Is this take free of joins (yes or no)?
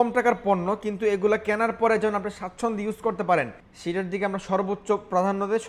yes